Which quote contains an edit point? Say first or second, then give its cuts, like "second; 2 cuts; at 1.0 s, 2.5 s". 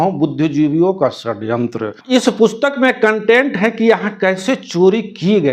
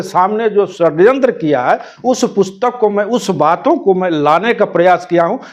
first; 1 cut; at 1.9 s